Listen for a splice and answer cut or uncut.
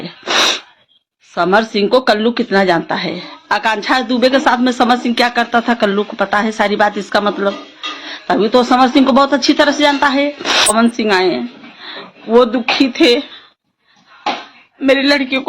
cut